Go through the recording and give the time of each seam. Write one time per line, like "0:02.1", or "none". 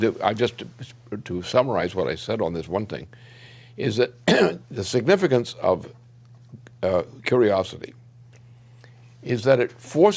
0:09.0